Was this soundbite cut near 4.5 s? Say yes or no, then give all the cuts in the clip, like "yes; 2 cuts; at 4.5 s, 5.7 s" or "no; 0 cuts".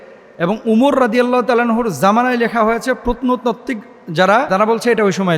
yes; 1 cut; at 4.5 s